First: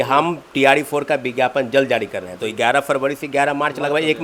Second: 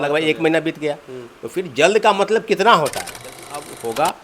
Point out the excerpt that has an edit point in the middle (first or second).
second